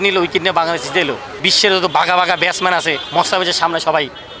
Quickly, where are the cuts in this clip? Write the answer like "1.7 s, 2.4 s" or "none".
1.5 s, 3.0 s